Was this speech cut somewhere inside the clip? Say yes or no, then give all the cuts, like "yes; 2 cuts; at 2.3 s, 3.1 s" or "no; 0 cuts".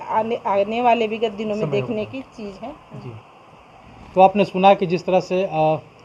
no; 0 cuts